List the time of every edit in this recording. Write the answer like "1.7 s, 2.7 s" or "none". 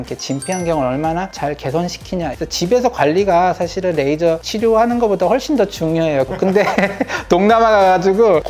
2.3 s, 6.3 s